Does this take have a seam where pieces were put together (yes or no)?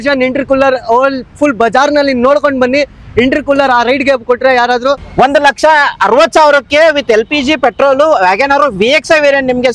yes